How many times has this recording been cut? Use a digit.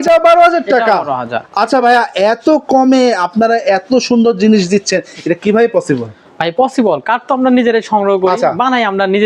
0